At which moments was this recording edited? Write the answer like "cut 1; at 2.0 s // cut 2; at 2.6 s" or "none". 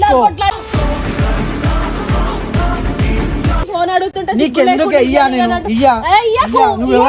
cut 1; at 3.7 s